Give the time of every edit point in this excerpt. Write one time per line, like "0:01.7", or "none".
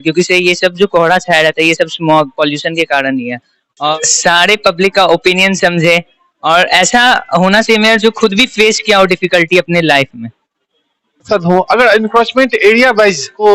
0:03.9
0:11.3

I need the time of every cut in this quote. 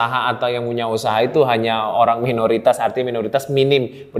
none

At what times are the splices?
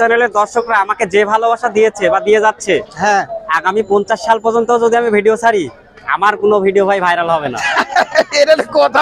none

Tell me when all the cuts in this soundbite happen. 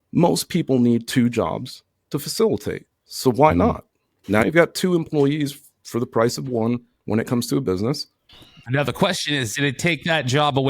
0:04.4

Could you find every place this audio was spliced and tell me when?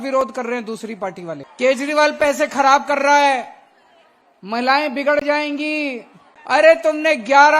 0:01.5
0:06.3

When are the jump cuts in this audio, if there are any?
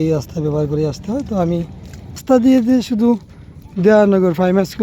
0:02.2

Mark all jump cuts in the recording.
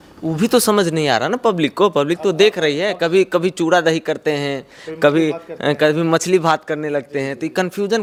none

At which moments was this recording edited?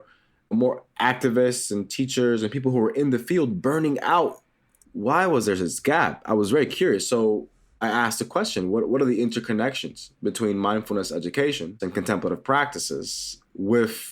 0:04.7
0:07.8
0:11.8

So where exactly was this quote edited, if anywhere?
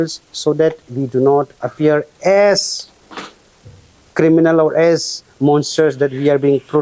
none

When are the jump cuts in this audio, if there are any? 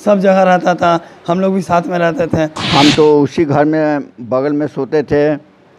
0:02.6

